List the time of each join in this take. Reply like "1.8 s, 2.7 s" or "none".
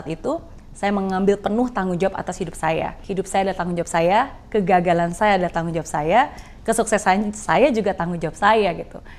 3.0 s